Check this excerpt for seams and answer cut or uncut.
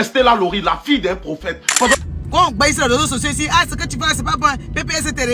cut